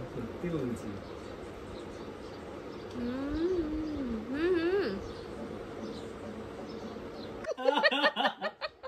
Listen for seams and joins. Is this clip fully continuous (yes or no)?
yes